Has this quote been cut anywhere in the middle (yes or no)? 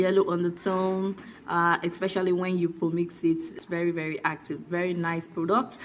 yes